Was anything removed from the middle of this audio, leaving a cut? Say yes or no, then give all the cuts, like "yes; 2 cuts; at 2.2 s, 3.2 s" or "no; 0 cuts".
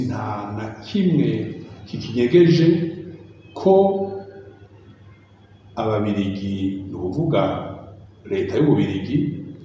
no; 0 cuts